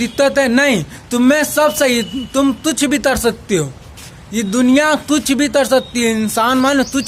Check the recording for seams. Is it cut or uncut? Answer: uncut